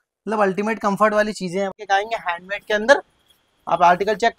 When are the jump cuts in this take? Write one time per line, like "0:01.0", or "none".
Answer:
0:01.7

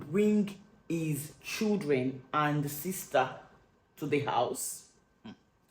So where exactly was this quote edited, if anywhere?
none

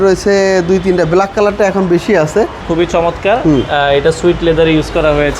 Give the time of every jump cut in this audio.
0:02.6

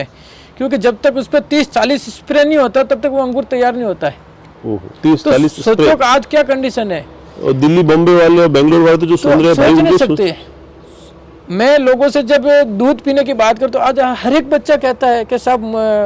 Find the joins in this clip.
none

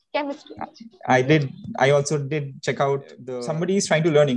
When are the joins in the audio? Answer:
0:03.2

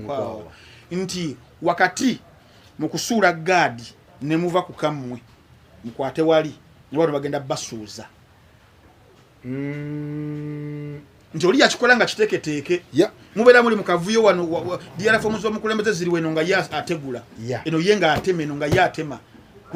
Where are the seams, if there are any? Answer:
none

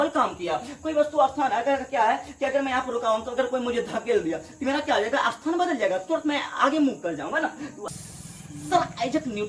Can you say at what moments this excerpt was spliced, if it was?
0:07.8

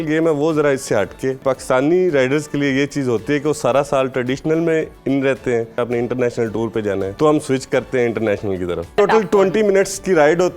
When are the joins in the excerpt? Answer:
0:01.4
0:05.8
0:07.1
0:08.9

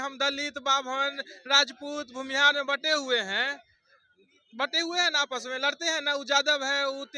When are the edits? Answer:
none

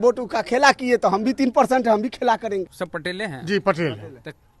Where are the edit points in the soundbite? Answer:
0:02.7

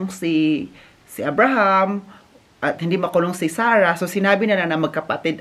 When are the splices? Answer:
none

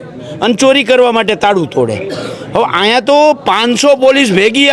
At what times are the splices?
none

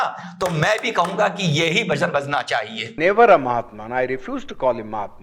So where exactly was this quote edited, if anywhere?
0:02.8

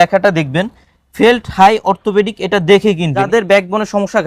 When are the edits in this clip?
0:03.3

